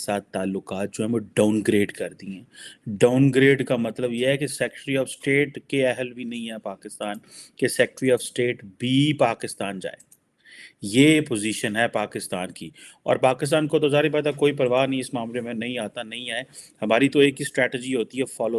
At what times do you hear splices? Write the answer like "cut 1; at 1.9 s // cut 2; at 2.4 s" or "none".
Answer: none